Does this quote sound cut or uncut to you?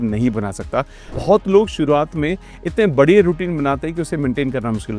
cut